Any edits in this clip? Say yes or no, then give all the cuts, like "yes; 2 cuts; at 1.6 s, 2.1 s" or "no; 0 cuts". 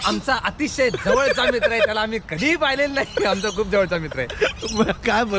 no; 0 cuts